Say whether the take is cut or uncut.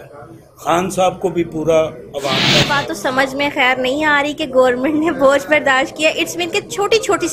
cut